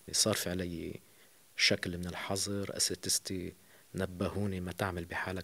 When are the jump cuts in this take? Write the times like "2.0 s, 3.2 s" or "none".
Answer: none